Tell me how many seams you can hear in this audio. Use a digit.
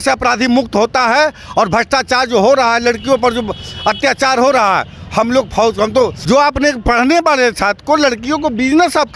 1